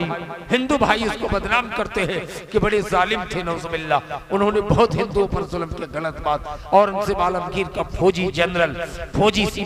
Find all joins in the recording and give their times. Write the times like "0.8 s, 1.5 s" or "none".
none